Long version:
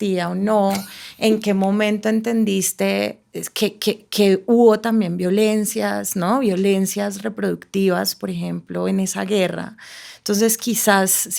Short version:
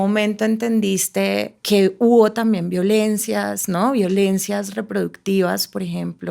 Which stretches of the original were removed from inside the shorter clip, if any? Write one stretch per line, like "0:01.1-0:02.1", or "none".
0:03.2-0:04.1